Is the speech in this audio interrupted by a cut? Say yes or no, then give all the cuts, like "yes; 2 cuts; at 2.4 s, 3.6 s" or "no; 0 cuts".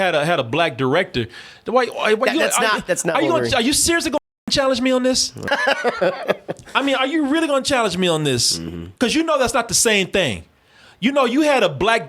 yes; 1 cut; at 5.5 s